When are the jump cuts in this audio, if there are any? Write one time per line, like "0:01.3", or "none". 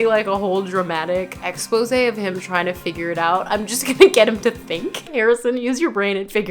0:01.5
0:05.1